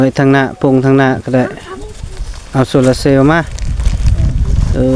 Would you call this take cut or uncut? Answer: uncut